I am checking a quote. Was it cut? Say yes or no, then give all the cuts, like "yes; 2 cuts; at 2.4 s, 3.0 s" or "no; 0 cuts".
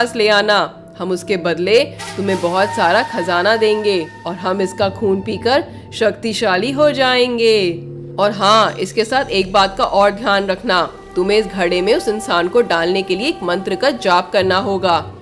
no; 0 cuts